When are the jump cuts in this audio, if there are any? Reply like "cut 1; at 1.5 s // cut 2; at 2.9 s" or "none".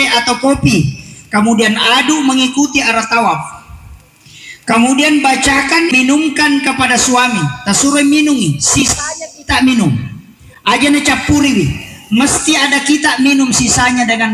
cut 1; at 5.9 s